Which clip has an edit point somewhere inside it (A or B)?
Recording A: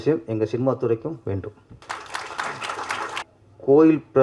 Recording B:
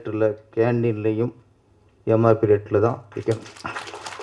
A